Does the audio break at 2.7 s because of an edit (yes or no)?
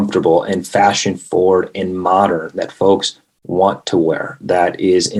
no